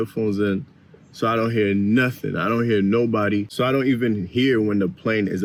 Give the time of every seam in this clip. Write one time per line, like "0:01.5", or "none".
none